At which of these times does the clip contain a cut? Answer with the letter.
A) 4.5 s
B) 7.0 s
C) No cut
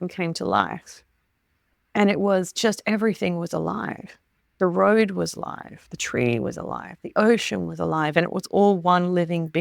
C